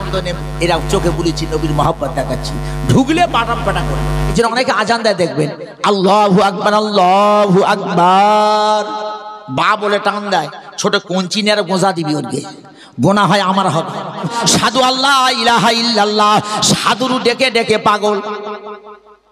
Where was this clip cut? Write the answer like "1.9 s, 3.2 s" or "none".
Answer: 4.3 s, 14.3 s